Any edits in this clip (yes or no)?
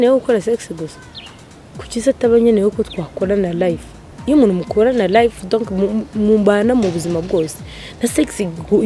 no